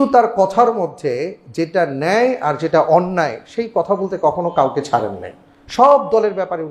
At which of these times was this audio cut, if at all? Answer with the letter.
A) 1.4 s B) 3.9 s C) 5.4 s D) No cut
D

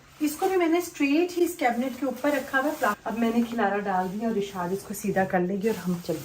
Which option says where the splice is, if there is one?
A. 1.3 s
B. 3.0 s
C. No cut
B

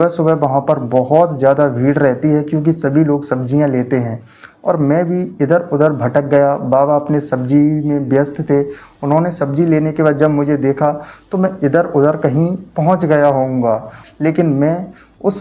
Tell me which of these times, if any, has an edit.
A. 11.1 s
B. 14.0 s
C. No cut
B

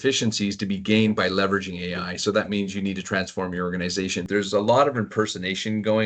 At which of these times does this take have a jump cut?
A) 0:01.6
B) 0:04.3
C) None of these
B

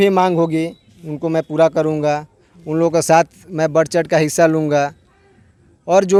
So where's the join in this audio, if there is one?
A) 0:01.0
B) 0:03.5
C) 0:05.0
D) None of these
D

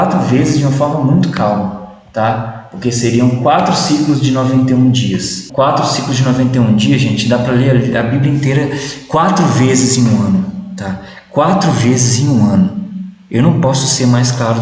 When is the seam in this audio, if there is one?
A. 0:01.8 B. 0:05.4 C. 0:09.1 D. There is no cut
B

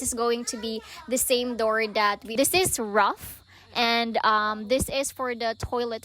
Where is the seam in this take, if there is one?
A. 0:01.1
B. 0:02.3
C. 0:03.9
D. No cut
B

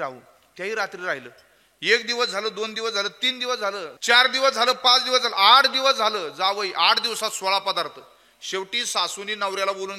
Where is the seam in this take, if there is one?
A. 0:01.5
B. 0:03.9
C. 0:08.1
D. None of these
B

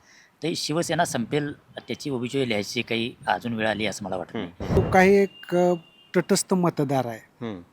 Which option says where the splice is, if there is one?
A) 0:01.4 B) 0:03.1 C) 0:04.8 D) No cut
C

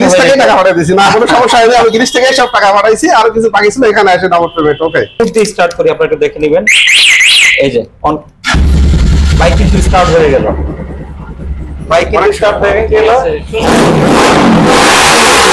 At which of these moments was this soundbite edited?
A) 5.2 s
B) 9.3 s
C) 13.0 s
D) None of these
A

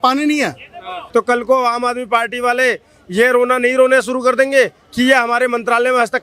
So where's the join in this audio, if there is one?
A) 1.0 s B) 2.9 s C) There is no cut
A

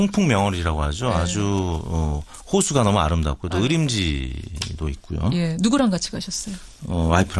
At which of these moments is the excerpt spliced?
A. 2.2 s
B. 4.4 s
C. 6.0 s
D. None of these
A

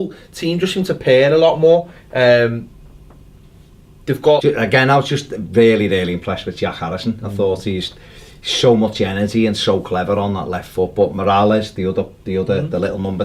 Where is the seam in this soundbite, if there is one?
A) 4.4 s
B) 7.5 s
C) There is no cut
C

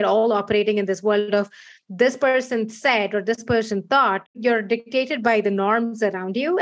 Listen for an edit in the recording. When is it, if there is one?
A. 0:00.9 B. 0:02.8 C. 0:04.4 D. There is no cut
C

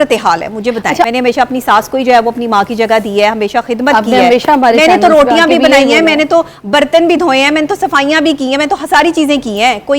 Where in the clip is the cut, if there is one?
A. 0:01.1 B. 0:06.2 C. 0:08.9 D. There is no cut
A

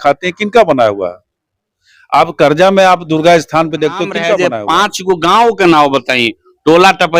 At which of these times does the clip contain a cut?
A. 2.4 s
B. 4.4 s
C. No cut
B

